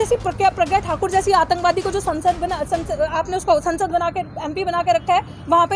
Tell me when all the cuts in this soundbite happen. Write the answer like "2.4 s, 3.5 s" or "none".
none